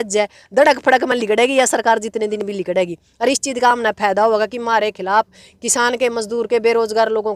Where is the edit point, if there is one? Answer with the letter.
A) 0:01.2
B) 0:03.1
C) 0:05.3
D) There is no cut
D